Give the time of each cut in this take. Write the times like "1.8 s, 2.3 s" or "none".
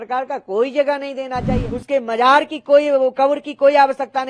1.7 s